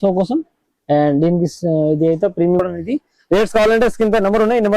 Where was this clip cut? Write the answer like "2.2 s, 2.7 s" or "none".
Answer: 2.6 s